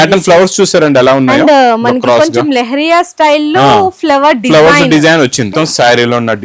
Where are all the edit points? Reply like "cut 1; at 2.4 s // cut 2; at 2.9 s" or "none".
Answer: cut 1; at 5.5 s